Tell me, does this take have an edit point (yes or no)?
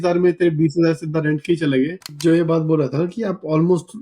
yes